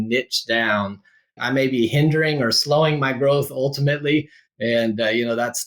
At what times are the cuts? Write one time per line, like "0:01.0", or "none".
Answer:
0:01.4